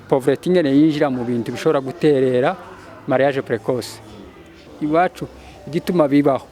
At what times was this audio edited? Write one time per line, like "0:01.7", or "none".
0:04.7

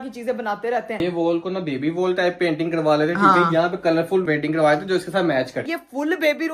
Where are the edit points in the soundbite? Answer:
0:01.0
0:04.3
0:05.7

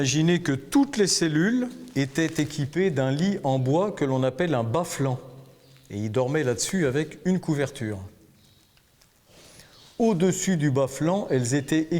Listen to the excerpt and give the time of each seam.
0:01.8

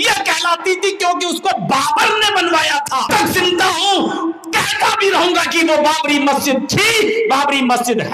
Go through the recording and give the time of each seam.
0:03.1

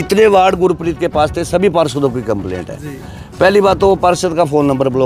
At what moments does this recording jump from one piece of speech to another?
none

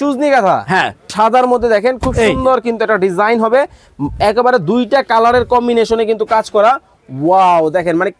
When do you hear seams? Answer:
0:01.0

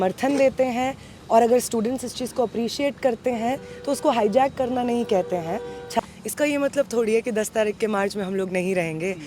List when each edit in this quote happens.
0:06.0

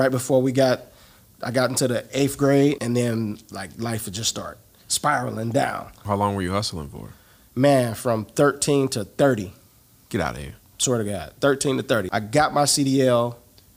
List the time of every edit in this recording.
0:02.8
0:06.0
0:12.1

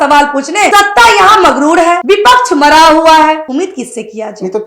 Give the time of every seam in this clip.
0:00.7
0:02.0
0:03.4

